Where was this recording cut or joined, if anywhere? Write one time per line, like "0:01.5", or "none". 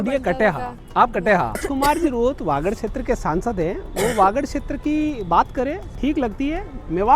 0:01.6